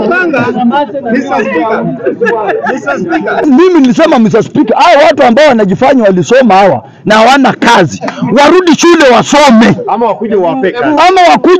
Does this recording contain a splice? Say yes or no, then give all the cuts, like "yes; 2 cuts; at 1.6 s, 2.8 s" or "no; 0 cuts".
yes; 1 cut; at 3.4 s